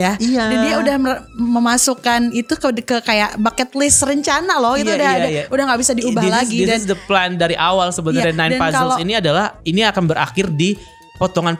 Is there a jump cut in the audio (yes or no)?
no